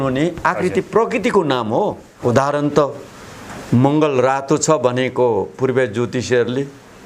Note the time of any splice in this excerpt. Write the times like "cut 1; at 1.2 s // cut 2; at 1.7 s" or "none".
cut 1; at 2.1 s